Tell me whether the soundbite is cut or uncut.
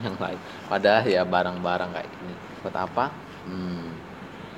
cut